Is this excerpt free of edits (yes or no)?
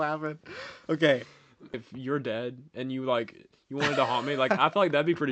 no